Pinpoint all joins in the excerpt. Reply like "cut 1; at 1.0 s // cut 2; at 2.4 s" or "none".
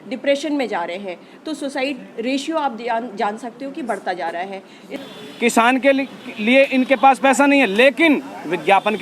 cut 1; at 4.9 s